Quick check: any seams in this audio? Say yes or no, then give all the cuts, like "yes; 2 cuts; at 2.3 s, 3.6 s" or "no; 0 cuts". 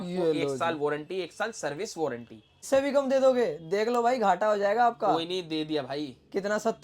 yes; 1 cut; at 2.6 s